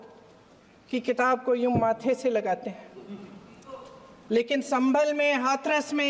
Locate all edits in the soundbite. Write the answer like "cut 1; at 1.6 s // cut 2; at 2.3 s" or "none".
none